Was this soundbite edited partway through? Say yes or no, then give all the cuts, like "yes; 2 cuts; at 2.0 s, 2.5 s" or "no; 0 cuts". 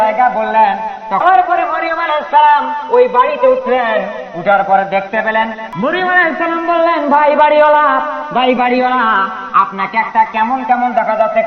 yes; 2 cuts; at 1.2 s, 5.6 s